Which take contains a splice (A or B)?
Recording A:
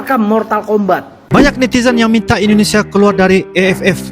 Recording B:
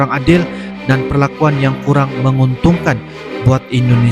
A